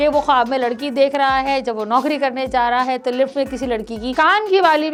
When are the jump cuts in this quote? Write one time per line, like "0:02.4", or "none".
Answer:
none

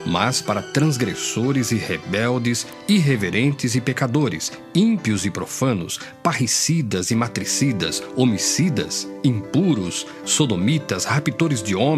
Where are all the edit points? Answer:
0:03.3

